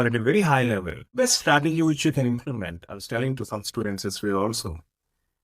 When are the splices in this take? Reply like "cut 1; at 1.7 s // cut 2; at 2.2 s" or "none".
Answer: cut 1; at 1.0 s